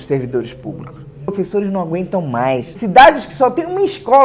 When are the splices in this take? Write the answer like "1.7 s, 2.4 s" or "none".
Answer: 1.3 s, 2.7 s